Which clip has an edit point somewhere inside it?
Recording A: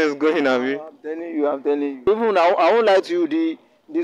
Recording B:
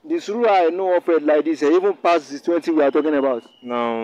A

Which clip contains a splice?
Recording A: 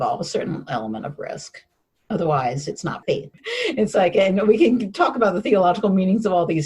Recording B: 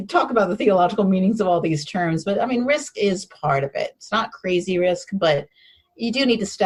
A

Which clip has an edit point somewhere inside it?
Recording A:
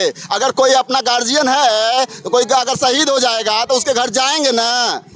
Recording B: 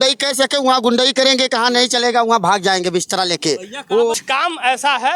B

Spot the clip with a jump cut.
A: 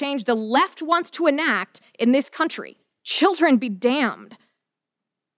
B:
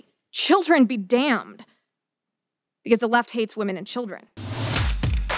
B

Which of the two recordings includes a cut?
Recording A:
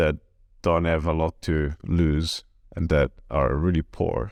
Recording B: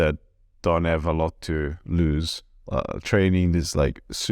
B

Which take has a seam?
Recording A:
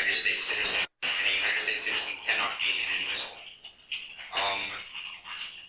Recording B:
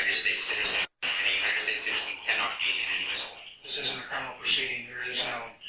B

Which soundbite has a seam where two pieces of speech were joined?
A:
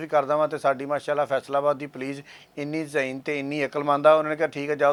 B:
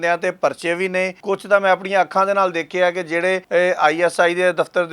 B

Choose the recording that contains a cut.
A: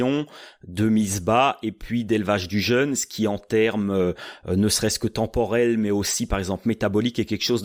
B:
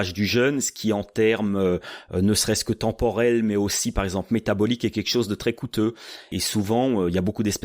B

